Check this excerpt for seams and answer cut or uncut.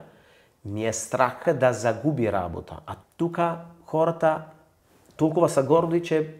cut